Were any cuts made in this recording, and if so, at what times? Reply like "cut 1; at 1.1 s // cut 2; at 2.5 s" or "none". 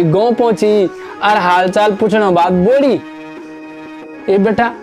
none